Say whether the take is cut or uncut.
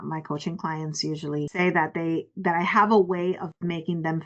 cut